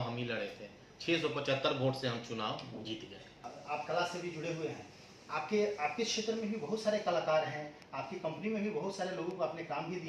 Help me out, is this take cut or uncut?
cut